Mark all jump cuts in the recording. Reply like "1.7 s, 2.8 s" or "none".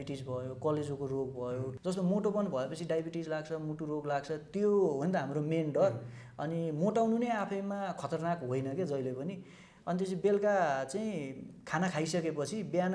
1.7 s, 9.7 s